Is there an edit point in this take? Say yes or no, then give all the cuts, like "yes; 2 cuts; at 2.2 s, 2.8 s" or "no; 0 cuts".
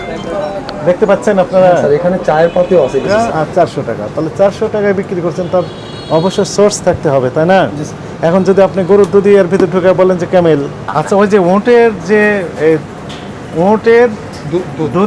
yes; 2 cuts; at 3.1 s, 10.8 s